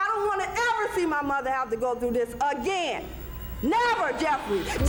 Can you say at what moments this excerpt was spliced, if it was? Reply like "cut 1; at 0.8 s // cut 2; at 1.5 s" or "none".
none